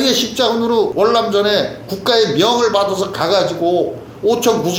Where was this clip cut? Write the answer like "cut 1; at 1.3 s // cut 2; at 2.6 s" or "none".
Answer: cut 1; at 0.9 s